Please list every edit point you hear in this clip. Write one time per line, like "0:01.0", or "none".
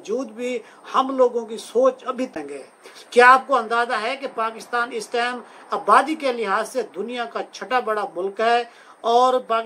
0:02.3